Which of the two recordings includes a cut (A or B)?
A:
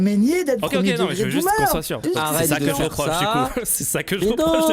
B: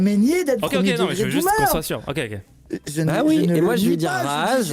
A